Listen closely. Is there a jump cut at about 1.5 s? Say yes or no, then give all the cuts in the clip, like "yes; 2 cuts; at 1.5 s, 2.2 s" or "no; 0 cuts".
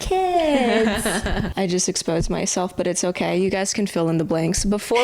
yes; 1 cut; at 1.5 s